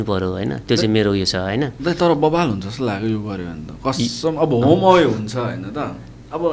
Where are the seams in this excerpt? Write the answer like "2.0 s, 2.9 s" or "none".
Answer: none